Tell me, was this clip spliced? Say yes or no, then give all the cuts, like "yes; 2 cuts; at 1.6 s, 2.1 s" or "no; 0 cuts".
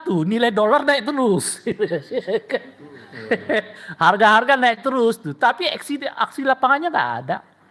no; 0 cuts